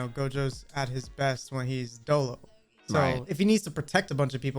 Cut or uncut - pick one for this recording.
cut